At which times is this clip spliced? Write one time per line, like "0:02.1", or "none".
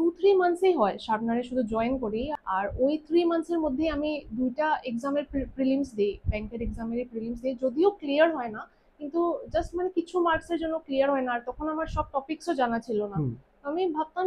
0:02.3